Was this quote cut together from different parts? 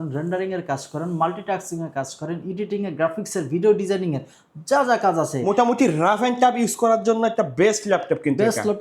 no; 0 cuts

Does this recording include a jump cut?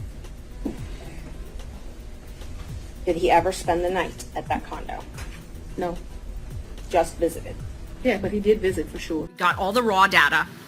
yes; 1 cut; at 9.3 s

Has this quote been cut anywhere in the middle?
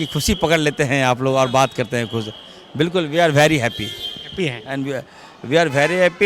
no; 0 cuts

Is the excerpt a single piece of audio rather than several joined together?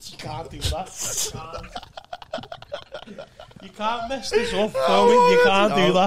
yes; 0 cuts

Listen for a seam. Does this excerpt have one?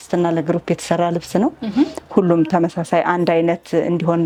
no; 0 cuts

